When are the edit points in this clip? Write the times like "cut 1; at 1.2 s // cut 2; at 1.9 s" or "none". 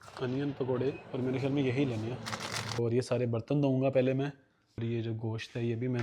cut 1; at 2.8 s // cut 2; at 4.8 s